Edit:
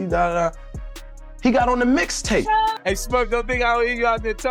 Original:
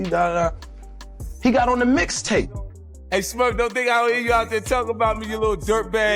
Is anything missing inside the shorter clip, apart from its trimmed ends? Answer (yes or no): yes